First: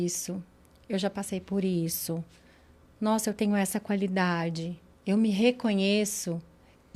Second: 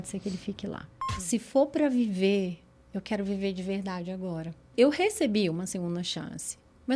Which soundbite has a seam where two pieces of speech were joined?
second; 2 cuts; at 0.9 s, 4.7 s

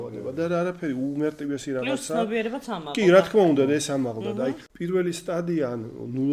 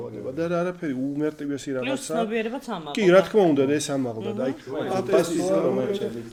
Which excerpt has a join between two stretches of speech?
first; 1 cut; at 4.6 s

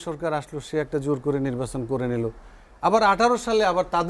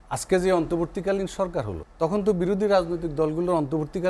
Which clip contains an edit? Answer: second; 1 cut; at 1.8 s

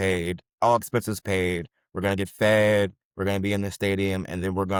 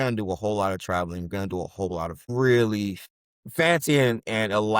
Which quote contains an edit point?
second; 2 cuts; at 2.3 s, 3.0 s

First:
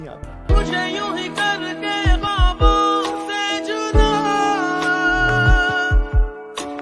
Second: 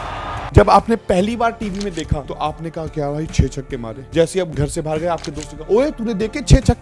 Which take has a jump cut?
second; 1 cut; at 4.0 s

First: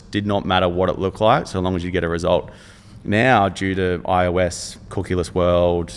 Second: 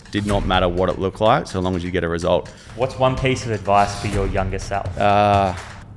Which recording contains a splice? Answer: second; 2 cuts; at 2.6 s, 4.9 s

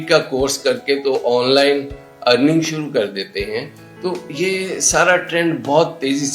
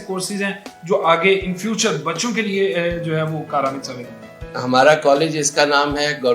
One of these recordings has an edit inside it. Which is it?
second; 1 cut; at 4.4 s

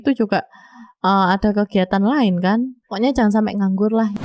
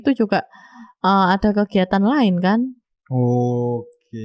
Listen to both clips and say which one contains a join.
first; 1 cut; at 2.8 s

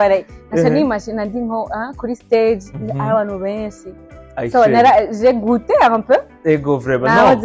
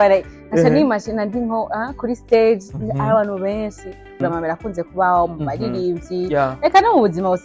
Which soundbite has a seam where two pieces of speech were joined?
second; 1 cut; at 4.2 s

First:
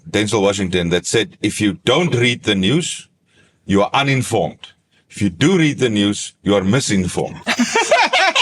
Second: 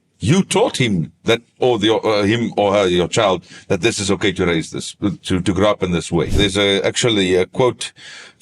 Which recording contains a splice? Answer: second; 1 cut; at 6.4 s

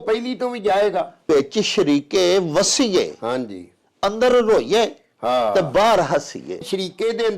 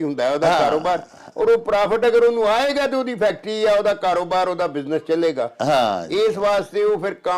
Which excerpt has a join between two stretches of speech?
first; 2 cuts; at 1.2 s, 6.6 s

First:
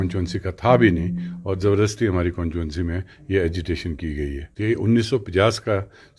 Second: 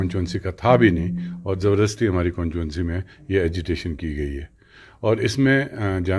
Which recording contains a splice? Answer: first; 1 cut; at 4.5 s

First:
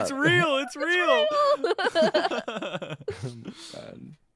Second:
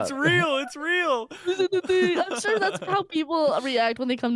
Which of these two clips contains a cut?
second; 1 cut; at 1.2 s

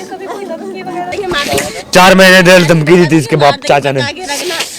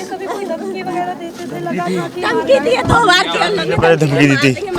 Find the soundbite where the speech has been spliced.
first; 1 cut; at 1.2 s

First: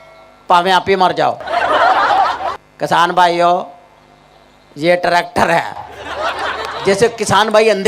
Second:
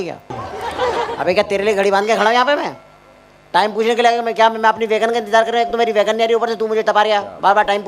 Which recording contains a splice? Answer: first; 1 cut; at 2.6 s

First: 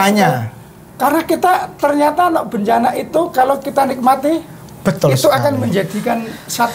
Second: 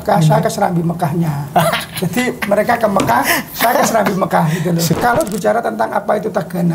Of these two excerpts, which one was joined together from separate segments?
second; 1 cut; at 4.9 s

